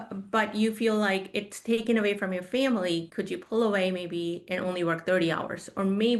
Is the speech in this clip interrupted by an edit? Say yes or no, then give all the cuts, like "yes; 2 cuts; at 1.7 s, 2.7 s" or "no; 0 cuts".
no; 0 cuts